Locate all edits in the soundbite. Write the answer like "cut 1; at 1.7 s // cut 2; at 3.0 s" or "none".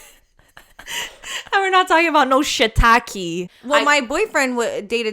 cut 1; at 3.5 s